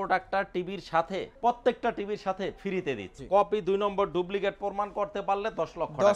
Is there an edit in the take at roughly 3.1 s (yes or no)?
yes